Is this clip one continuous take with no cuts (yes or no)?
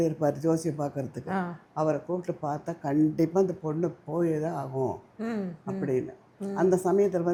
yes